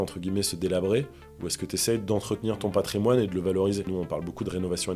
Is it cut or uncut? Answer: cut